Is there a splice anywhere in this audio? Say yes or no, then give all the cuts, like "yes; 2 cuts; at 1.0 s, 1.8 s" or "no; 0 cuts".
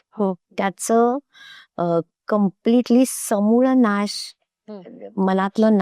no; 0 cuts